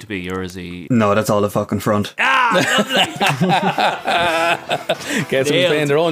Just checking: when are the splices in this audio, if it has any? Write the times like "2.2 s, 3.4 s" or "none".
0.8 s, 2.1 s